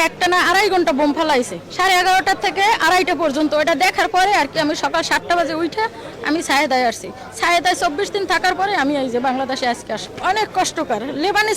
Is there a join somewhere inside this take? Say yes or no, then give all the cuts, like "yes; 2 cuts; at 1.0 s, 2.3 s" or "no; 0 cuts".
no; 0 cuts